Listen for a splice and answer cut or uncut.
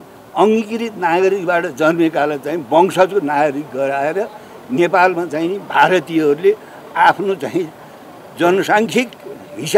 uncut